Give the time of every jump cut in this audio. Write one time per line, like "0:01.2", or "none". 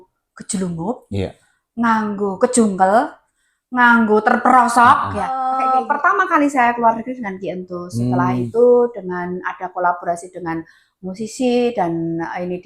0:05.6

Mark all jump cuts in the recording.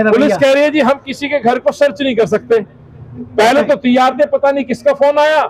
none

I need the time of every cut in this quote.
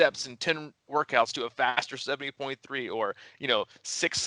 none

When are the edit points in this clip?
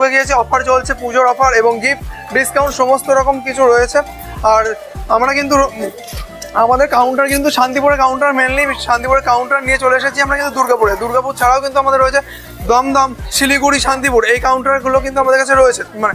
none

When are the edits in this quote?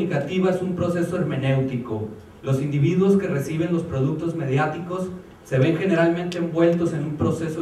0:04.6

